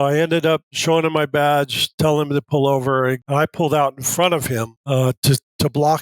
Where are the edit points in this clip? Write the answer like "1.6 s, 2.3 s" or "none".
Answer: 3.2 s, 4.8 s